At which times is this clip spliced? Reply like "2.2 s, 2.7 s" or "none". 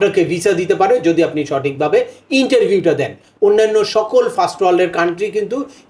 3.3 s